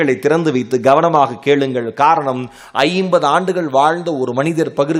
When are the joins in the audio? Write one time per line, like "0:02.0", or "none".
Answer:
none

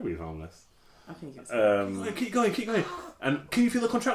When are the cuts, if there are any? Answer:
0:02.1

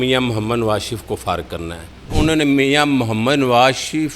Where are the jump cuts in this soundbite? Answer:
0:02.1

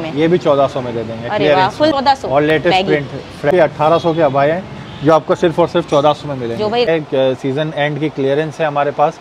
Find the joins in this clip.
0:01.9
0:03.5
0:06.9

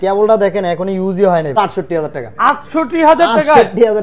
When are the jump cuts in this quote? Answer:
0:01.6

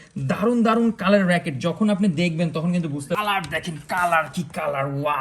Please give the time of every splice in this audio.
0:03.2

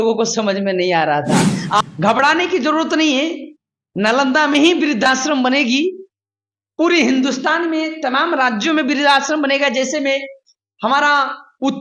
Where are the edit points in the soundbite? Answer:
0:01.8

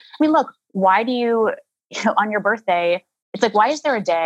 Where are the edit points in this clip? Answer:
none

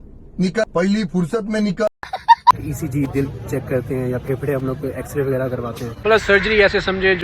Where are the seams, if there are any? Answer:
0:02.5
0:06.0

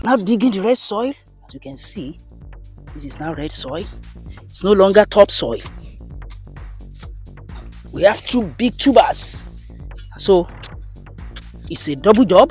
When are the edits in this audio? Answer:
0:05.7
0:07.9

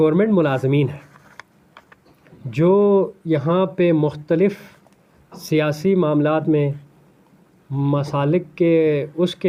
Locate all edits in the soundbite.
none

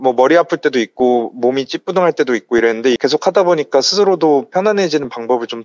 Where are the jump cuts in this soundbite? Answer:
0:03.0

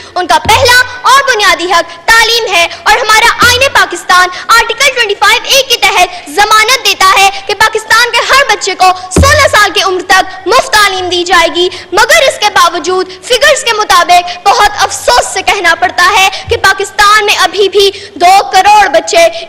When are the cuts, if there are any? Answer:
none

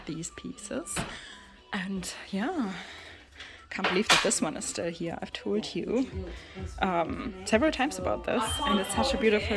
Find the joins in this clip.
none

